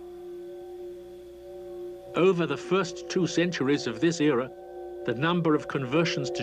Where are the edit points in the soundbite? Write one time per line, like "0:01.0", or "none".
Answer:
none